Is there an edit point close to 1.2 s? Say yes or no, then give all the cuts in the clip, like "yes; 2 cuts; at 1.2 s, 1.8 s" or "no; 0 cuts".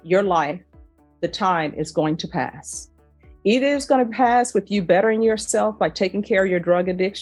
no; 0 cuts